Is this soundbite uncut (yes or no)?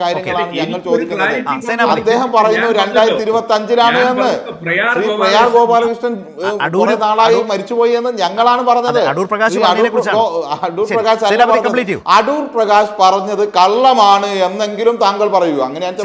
yes